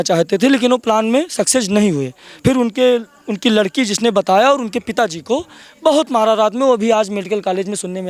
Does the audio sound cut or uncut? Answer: uncut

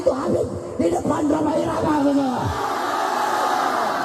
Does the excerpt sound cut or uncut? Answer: uncut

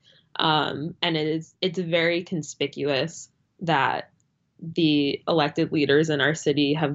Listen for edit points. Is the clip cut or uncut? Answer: uncut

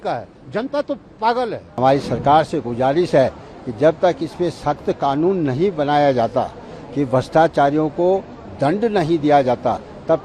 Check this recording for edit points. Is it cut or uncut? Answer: cut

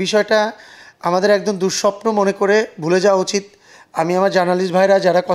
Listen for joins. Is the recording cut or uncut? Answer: uncut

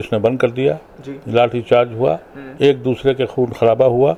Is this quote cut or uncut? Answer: uncut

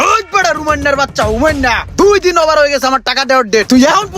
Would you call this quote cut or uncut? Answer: uncut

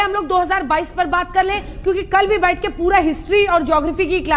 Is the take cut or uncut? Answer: uncut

